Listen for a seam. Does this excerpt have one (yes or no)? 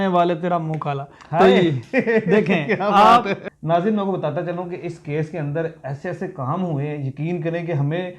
yes